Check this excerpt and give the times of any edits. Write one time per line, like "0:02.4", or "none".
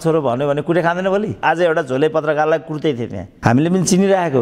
0:01.4